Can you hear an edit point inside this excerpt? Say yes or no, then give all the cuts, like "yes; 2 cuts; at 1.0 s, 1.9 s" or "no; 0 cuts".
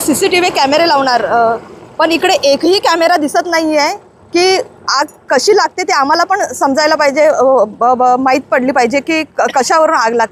no; 0 cuts